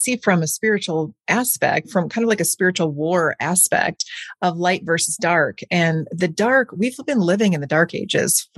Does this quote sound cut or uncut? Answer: cut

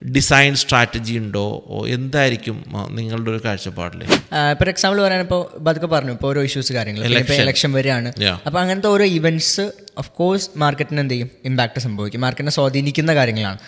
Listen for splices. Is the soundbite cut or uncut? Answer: cut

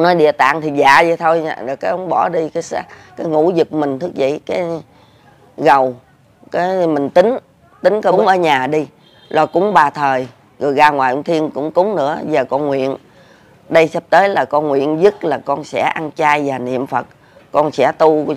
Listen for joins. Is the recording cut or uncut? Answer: cut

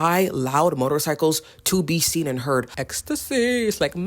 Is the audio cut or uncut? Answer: cut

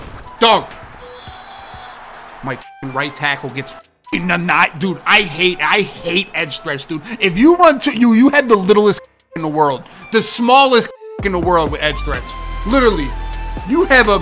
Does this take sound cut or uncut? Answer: uncut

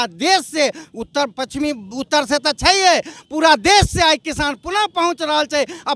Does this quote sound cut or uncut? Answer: uncut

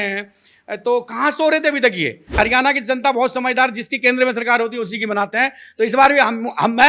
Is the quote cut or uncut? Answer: cut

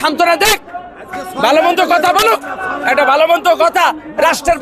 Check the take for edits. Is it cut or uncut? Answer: uncut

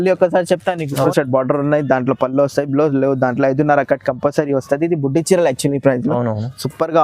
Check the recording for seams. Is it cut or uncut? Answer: cut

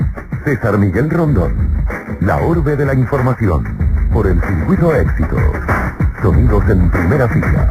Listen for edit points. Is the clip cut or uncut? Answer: uncut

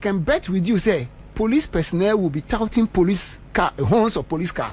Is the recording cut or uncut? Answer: uncut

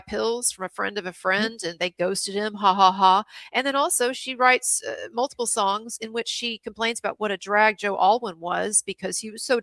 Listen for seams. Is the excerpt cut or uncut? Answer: uncut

